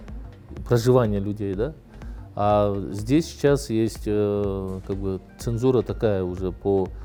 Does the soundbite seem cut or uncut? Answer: uncut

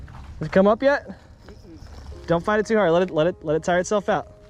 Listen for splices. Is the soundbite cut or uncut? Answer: uncut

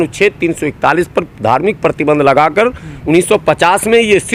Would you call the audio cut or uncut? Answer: uncut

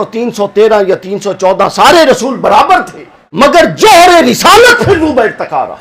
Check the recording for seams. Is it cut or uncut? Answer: cut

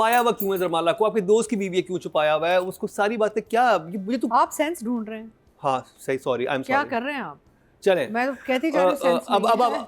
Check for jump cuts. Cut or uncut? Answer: uncut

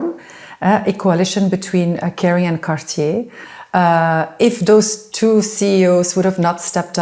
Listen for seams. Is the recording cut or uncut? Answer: uncut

